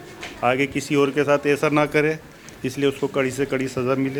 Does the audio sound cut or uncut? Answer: uncut